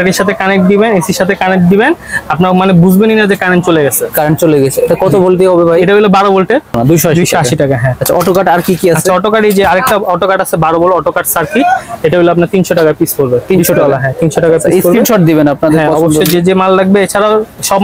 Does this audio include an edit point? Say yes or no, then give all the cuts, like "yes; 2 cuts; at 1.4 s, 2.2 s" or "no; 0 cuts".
no; 0 cuts